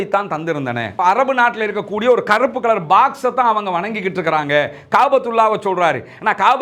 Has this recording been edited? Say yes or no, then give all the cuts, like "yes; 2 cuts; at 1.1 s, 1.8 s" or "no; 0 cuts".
yes; 1 cut; at 0.9 s